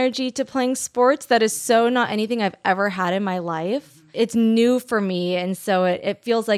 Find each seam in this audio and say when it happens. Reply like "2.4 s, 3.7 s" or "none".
3.8 s